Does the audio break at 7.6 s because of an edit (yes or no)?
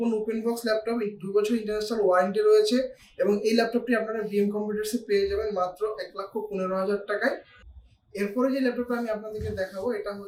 no